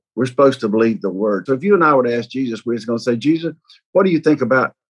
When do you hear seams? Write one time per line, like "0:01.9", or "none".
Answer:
0:01.4